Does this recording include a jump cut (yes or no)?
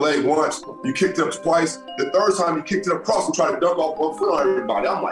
no